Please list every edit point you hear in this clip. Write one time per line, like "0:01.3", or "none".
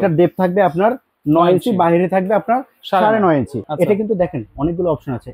0:03.6